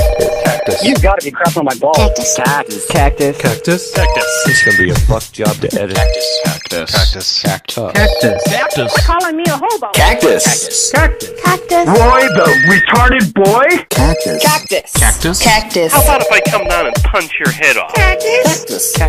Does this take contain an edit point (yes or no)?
no